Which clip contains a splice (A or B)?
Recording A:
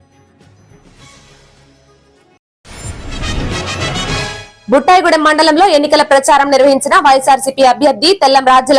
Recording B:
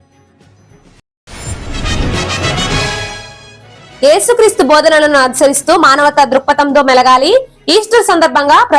B